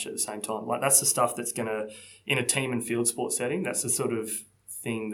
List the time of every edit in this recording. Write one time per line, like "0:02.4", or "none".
none